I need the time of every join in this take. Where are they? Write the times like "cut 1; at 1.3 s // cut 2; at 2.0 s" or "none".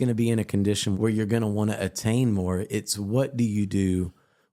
cut 1; at 0.9 s